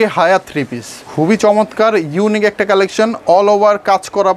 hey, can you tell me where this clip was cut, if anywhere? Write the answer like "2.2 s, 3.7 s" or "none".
1.0 s